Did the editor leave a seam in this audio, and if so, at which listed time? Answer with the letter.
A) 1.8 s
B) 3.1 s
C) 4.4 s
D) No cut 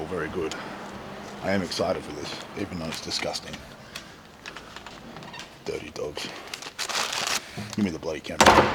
D